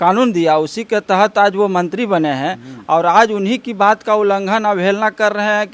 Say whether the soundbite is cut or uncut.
uncut